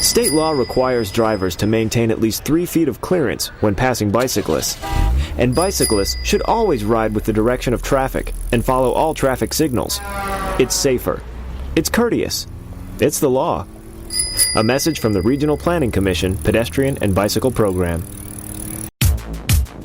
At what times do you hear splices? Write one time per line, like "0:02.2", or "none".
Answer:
0:18.9